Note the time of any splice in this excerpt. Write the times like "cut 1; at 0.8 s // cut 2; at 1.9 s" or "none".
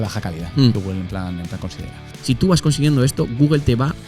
cut 1; at 2.0 s